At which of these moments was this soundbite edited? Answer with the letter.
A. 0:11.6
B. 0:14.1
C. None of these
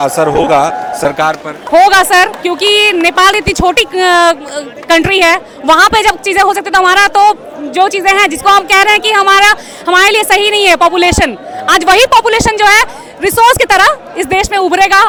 C